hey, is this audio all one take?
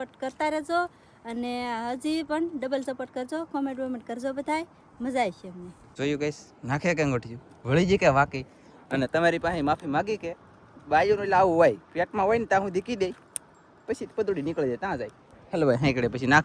yes; 0 cuts

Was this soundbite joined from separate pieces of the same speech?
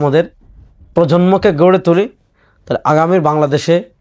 no; 0 cuts

